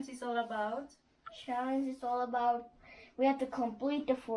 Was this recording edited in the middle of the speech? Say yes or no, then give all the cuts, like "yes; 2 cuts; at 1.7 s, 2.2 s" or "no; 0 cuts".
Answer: no; 0 cuts